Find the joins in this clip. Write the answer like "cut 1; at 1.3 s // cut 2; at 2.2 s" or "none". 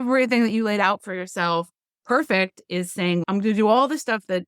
cut 1; at 3.2 s